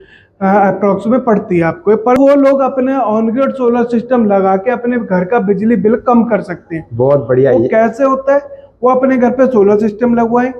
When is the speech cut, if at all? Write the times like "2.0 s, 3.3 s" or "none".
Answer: 2.2 s